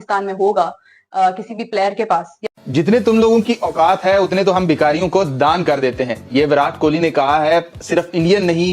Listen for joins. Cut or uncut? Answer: cut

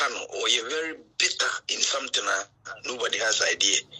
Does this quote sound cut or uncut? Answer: uncut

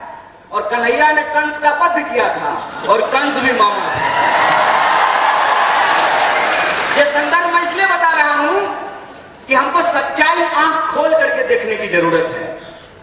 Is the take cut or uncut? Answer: uncut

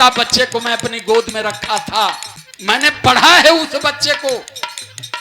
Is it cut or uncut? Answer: cut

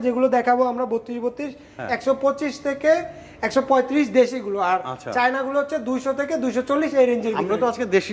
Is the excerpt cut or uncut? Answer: uncut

